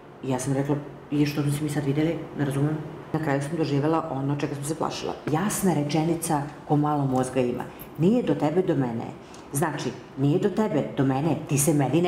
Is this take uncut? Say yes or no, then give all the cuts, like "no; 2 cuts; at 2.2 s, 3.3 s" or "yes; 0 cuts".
no; 2 cuts; at 3.1 s, 5.3 s